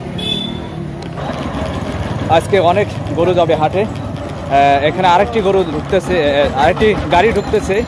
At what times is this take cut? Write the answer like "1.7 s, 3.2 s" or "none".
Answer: none